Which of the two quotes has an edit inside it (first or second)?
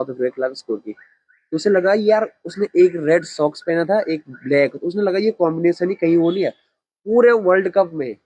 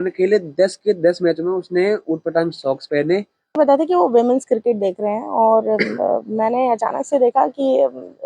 second